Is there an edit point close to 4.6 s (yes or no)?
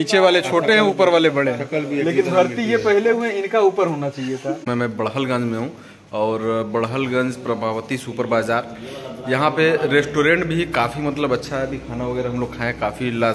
yes